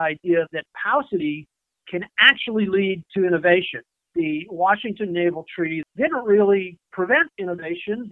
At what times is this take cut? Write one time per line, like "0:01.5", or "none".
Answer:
0:04.1
0:05.8